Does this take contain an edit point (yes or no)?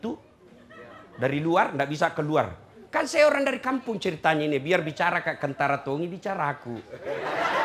no